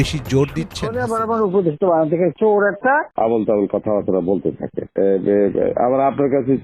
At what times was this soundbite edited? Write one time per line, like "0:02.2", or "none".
0:01.0